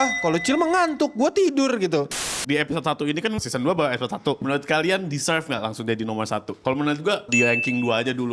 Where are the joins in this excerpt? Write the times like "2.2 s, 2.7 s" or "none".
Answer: 2.2 s, 3.4 s, 4.4 s, 6.5 s, 7.3 s